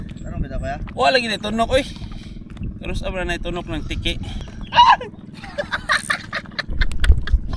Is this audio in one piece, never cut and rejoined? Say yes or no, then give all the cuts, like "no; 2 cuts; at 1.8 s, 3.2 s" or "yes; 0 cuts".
no; 1 cut; at 4.4 s